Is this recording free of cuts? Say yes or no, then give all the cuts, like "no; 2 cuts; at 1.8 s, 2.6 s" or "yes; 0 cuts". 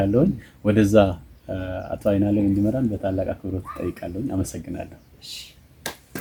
yes; 0 cuts